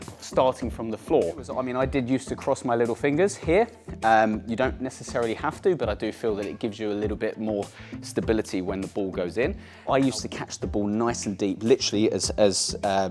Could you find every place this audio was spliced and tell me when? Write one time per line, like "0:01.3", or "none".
0:01.7
0:09.7